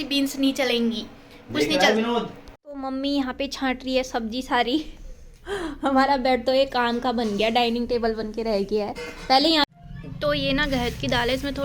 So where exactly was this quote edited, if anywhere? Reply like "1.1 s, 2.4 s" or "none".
2.7 s, 9.7 s